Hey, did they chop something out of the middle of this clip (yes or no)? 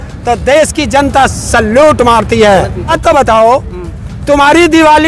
yes